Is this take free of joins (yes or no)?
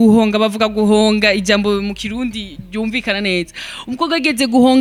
yes